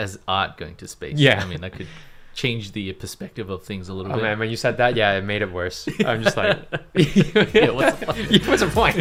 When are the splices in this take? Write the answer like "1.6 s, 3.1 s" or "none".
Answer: none

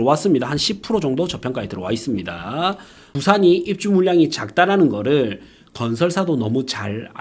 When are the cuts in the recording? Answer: 3.1 s

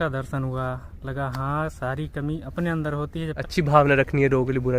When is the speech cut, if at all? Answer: 3.4 s

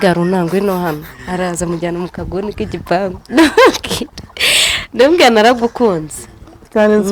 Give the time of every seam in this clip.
none

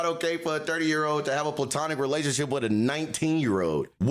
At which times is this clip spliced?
none

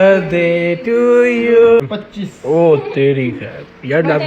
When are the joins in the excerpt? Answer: 1.8 s

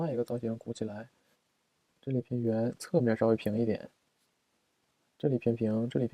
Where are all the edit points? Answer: 1.5 s

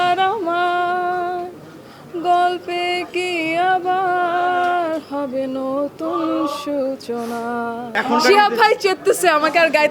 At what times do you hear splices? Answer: 7.9 s

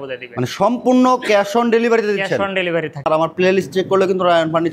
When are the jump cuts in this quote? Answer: 3.1 s

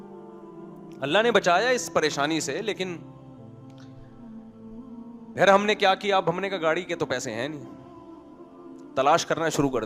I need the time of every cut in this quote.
none

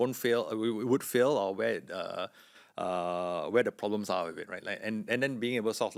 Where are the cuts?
none

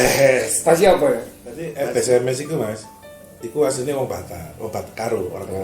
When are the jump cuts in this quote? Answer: 1.7 s

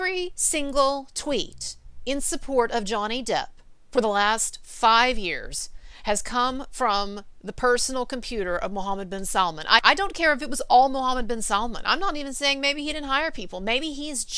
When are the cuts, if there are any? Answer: 9.8 s

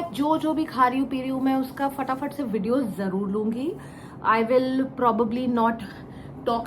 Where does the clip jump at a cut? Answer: none

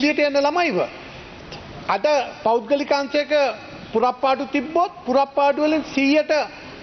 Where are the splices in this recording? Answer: none

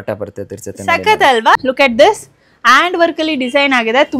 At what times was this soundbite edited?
1.6 s

